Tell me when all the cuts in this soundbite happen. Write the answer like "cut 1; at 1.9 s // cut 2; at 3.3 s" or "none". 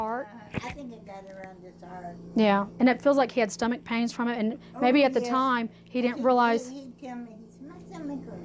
none